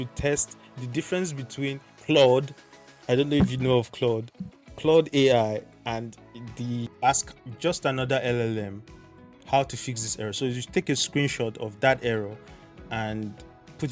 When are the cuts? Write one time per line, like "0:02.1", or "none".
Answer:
0:06.9